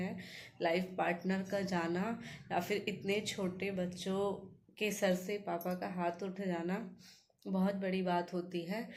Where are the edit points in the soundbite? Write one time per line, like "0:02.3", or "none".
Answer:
none